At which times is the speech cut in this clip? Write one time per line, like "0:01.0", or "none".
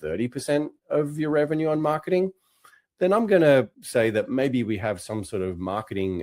0:03.7